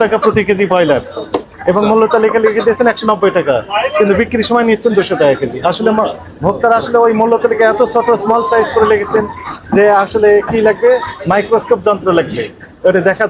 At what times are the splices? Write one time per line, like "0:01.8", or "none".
none